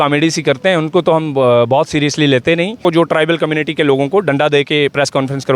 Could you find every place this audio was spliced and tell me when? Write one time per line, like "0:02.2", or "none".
0:02.8